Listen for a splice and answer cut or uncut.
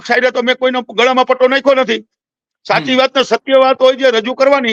uncut